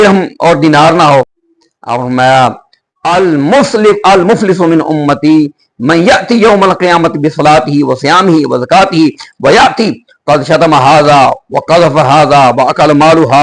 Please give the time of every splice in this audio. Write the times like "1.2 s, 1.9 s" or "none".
1.4 s